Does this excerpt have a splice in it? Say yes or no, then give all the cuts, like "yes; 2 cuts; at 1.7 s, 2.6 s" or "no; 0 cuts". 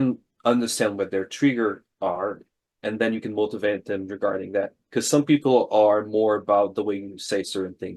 no; 0 cuts